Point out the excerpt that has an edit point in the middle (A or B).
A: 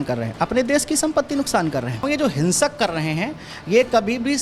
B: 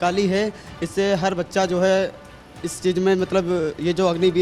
A